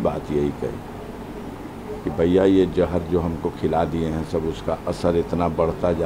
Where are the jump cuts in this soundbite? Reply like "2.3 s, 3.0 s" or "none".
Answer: none